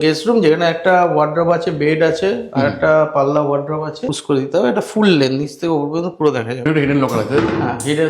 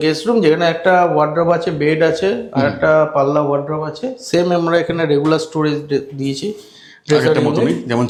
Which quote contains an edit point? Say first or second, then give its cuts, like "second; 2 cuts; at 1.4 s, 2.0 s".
first; 2 cuts; at 4.1 s, 6.6 s